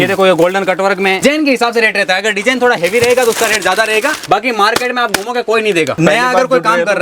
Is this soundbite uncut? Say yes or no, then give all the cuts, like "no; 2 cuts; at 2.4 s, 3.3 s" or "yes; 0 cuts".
no; 3 cuts; at 1.2 s, 4.2 s, 6.0 s